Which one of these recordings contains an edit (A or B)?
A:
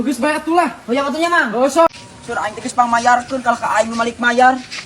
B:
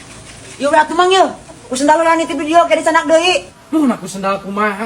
A